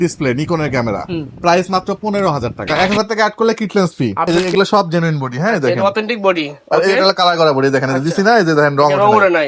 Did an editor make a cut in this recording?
yes; 2 cuts; at 2.7 s, 4.3 s

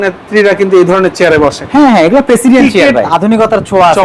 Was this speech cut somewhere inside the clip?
yes; 1 cut; at 3.1 s

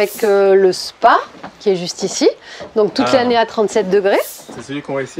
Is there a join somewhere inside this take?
no; 0 cuts

